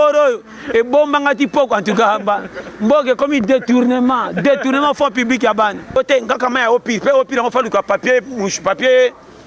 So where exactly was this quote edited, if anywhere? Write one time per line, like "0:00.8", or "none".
0:06.0